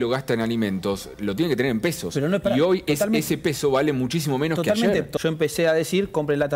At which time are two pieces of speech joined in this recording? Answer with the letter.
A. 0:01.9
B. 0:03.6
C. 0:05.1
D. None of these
C